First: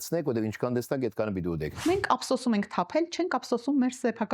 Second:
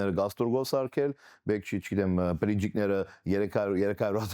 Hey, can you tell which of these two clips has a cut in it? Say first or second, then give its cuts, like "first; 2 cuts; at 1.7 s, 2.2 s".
first; 1 cut; at 1.7 s